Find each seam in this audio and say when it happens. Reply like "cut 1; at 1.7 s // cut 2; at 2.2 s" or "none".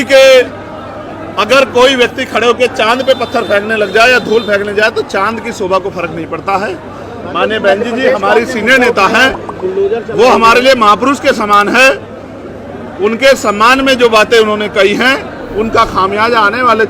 none